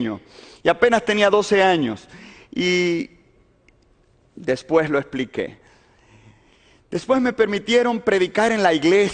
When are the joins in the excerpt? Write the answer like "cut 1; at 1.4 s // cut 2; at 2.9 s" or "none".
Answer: cut 1; at 5.4 s